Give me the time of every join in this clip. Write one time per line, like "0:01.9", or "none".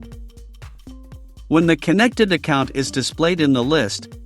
0:01.0